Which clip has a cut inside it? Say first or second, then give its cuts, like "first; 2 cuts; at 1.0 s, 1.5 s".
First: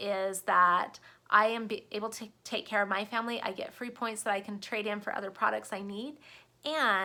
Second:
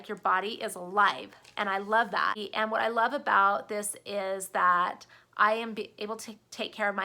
second; 1 cut; at 2.4 s